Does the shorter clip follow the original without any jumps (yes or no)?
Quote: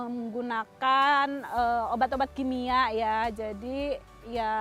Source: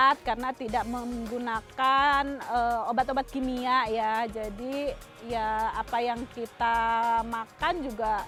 yes